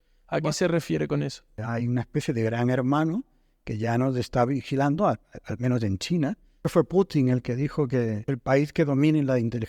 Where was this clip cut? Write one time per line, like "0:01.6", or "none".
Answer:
0:01.6
0:06.6
0:08.2